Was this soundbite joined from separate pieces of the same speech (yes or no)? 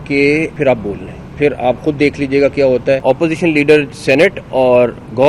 yes